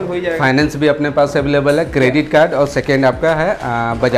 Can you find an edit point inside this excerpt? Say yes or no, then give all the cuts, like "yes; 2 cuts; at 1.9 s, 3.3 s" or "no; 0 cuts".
no; 0 cuts